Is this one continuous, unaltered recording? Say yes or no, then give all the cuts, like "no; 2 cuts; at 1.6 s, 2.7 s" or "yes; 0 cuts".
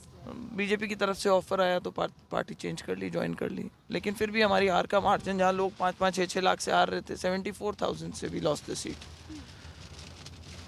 no; 1 cut; at 3.8 s